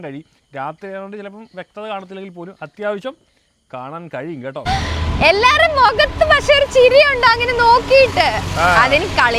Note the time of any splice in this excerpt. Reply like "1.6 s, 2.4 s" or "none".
4.6 s